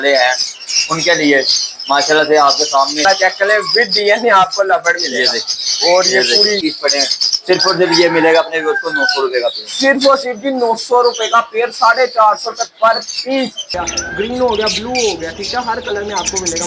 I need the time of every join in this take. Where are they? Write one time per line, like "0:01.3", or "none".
0:03.0
0:06.6
0:13.7